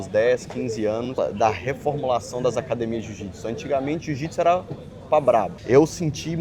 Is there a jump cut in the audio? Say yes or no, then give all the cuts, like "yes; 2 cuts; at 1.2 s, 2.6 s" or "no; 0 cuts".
yes; 2 cuts; at 1.2 s, 5.6 s